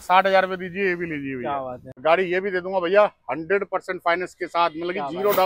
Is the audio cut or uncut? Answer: cut